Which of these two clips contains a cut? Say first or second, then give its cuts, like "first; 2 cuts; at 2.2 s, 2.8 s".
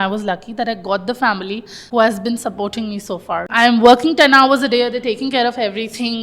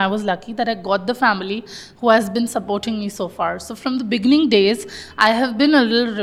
first; 2 cuts; at 1.7 s, 3.5 s